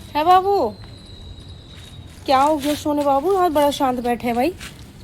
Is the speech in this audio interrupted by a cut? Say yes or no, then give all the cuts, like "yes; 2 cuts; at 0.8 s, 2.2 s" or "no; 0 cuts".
no; 0 cuts